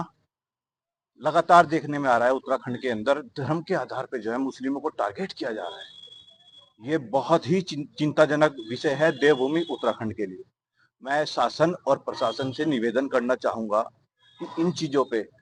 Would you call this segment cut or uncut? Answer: uncut